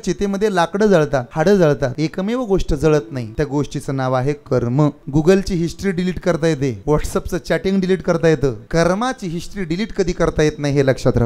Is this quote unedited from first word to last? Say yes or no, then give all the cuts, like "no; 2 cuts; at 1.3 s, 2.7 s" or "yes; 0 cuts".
no; 6 cuts; at 1.3 s, 1.9 s, 3.2 s, 5.0 s, 6.8 s, 8.6 s